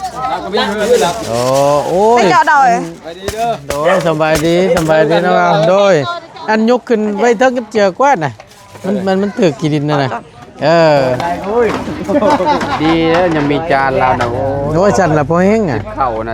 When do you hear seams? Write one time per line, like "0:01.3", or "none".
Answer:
0:11.2